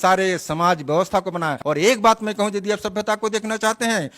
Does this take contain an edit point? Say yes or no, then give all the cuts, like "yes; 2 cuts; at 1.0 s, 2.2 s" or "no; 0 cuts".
yes; 1 cut; at 1.6 s